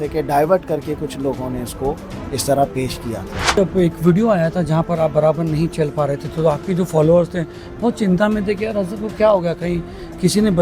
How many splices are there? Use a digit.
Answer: 1